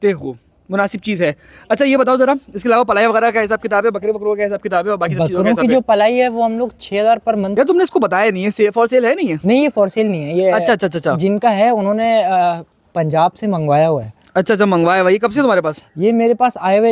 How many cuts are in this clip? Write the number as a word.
one